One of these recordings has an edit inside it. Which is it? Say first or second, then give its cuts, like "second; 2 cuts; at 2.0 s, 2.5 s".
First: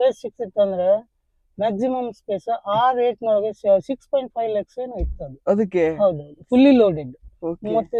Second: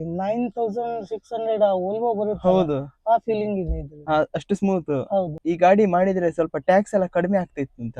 second; 1 cut; at 5.3 s